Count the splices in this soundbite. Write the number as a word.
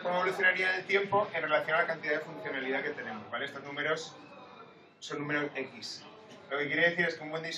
zero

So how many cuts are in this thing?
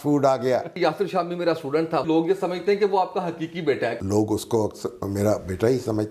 three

